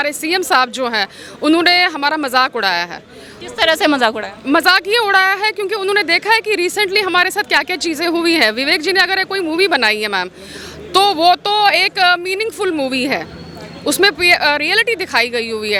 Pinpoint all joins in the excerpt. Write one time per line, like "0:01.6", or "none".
none